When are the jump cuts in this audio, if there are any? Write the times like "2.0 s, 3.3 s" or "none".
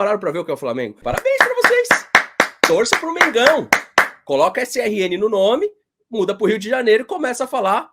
1.0 s